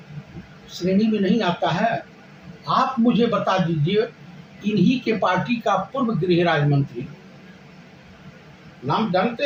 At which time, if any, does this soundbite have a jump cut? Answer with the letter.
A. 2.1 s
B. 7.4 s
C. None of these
C